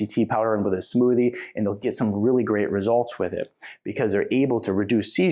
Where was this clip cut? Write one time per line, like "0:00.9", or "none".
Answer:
none